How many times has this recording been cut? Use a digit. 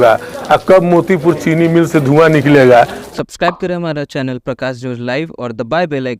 1